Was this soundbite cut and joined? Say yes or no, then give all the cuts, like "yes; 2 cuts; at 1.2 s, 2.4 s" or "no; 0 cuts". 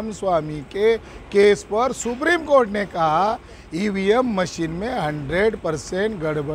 no; 0 cuts